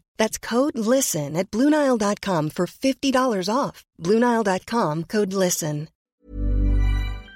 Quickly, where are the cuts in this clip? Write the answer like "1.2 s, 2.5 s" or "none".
5.9 s